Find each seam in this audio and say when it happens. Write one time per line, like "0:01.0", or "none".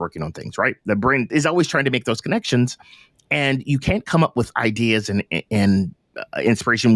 0:01.3